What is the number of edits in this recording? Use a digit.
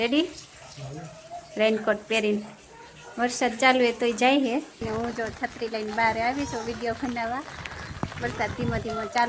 1